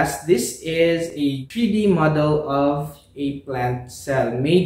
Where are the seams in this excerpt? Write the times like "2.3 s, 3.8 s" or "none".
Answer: 1.2 s